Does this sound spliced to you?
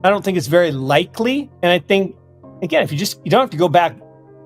yes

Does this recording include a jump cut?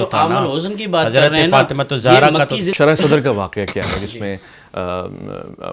yes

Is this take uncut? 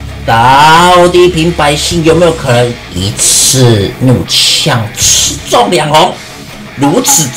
yes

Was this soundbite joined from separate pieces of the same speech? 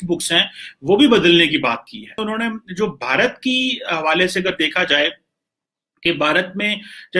yes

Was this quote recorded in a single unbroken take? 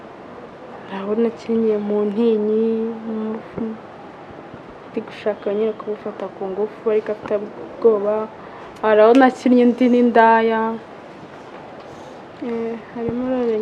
yes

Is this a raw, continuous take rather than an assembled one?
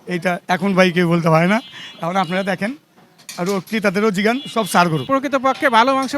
no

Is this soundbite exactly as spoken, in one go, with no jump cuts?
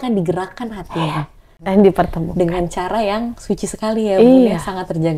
no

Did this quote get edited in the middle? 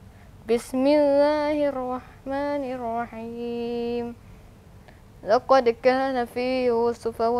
no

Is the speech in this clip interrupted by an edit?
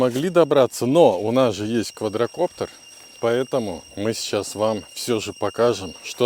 no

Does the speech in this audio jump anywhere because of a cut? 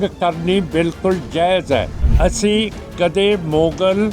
yes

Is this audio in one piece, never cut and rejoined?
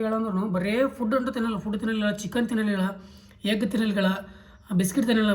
yes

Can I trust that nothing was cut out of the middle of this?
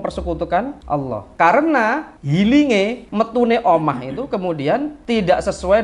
no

